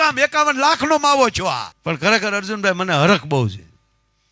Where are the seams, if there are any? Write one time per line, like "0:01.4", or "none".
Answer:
0:01.7